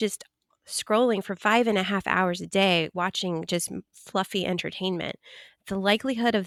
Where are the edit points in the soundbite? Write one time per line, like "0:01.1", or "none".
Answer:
none